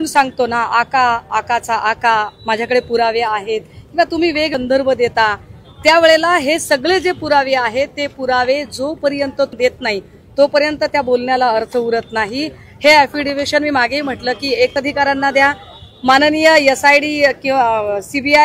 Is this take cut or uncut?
uncut